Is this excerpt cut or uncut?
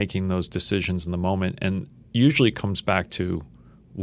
uncut